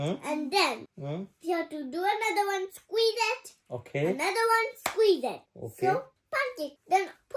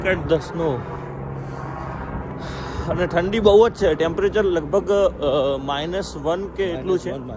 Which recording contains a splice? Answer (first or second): first